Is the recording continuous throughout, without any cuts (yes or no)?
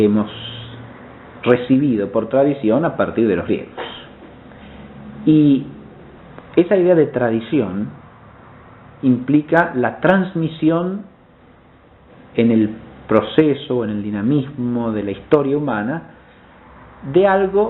yes